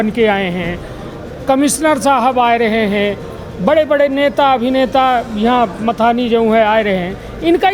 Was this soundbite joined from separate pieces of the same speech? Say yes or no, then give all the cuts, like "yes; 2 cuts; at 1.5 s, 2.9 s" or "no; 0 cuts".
no; 0 cuts